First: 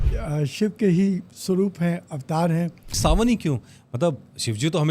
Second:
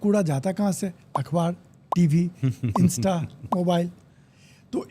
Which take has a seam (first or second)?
first